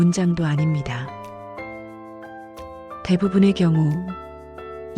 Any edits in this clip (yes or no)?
no